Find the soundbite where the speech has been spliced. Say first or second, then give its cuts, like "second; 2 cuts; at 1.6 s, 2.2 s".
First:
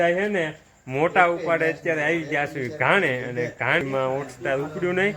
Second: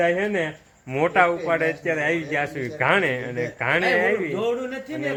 first; 1 cut; at 3.8 s